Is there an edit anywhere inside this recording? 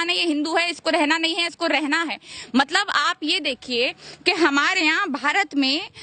no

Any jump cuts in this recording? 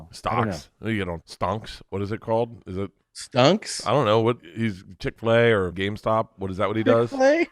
yes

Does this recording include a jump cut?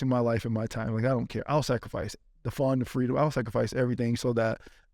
no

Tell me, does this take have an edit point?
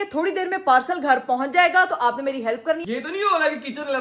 yes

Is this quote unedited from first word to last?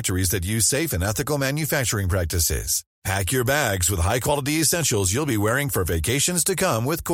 yes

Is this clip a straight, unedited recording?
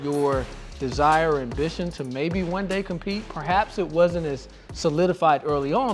yes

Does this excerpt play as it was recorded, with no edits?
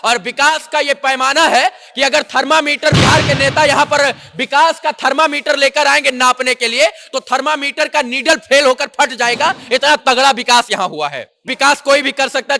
no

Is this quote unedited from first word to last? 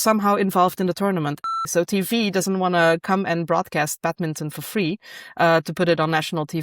no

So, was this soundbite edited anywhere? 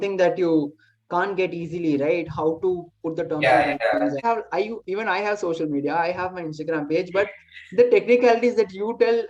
yes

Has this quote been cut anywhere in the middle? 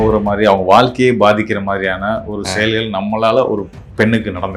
no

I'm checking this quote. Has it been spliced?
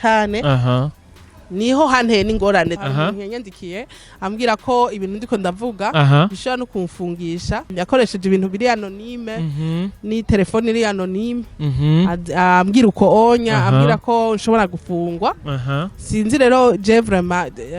yes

